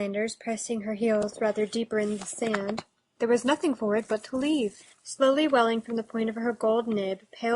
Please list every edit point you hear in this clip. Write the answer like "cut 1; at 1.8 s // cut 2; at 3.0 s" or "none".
cut 1; at 5.8 s